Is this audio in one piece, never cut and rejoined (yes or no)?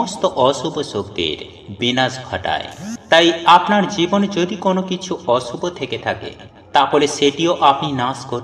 yes